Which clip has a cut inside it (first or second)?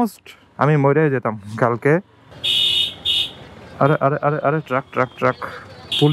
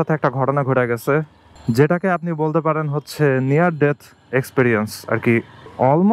first